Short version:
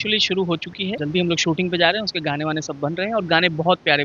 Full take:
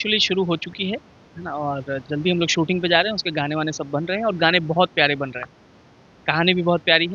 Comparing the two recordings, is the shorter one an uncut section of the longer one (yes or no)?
no